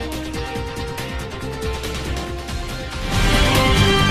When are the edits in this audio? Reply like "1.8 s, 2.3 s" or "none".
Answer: none